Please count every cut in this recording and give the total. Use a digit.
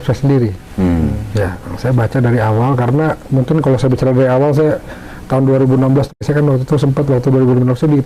1